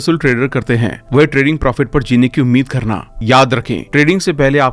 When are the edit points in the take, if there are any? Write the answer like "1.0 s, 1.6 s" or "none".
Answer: none